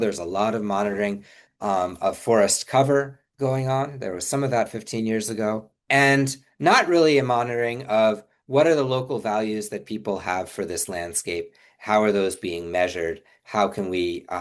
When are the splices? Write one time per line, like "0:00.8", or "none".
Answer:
0:05.8